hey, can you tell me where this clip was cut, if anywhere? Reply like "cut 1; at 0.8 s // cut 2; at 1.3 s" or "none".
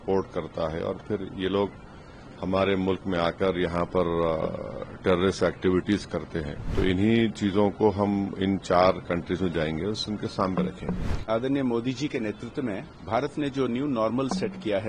cut 1; at 6.6 s // cut 2; at 12.9 s